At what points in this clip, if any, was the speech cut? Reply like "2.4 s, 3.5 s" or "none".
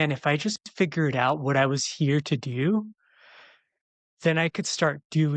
none